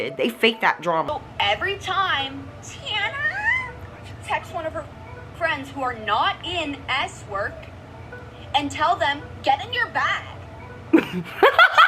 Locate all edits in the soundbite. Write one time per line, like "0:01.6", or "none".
0:01.1